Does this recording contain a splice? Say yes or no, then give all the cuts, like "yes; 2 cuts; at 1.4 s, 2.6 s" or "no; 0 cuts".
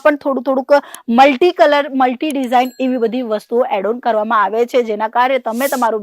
no; 0 cuts